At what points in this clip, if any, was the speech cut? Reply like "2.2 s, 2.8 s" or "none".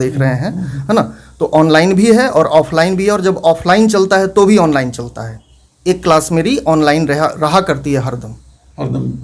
none